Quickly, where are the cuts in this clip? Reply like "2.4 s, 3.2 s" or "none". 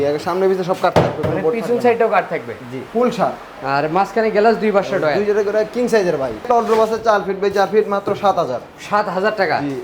2.8 s, 6.4 s